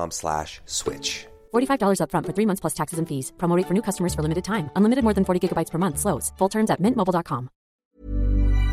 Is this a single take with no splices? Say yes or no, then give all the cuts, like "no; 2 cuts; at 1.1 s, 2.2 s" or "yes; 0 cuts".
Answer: no; 1 cut; at 7.8 s